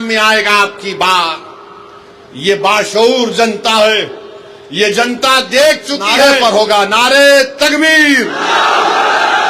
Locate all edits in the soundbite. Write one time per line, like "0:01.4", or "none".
0:06.0